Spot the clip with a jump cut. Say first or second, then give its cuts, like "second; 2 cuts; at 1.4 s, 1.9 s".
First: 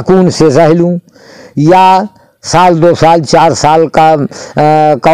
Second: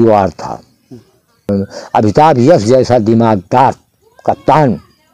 second; 1 cut; at 1.5 s